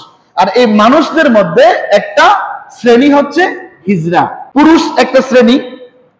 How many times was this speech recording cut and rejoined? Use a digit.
1